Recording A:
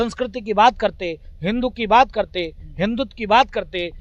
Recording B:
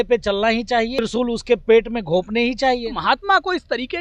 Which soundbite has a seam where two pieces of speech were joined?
B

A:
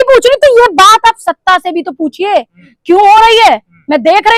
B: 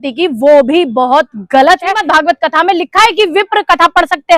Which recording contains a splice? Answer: B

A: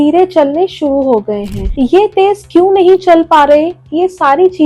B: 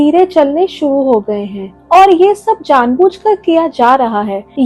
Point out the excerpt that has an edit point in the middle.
A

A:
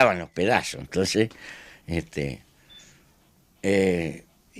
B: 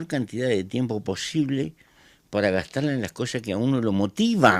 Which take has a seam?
A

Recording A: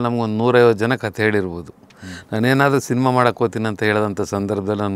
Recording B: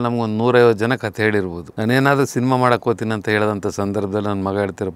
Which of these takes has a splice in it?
B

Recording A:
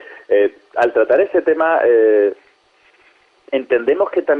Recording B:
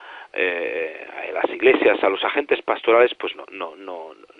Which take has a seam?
B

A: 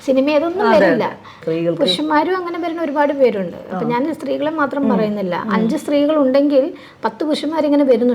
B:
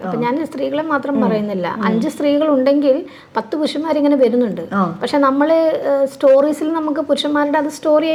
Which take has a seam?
A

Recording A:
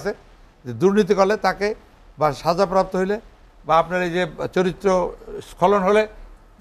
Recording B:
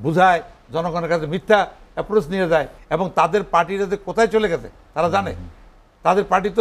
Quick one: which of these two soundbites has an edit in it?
B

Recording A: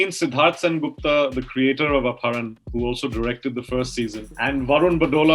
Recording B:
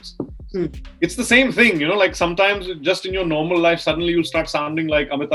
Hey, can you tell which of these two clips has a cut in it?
A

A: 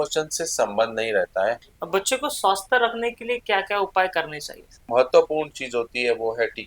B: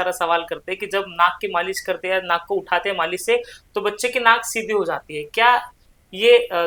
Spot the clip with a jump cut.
A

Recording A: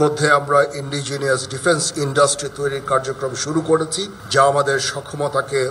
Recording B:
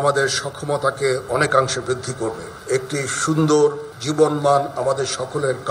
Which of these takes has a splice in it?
B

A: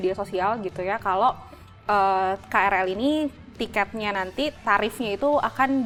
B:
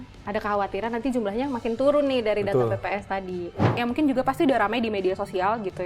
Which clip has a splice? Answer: B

